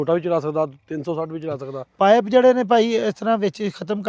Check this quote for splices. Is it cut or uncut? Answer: cut